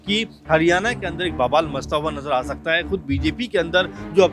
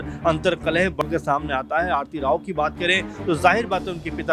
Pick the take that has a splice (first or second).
second